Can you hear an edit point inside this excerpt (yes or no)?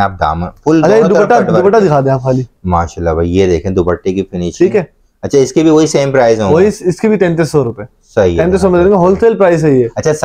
no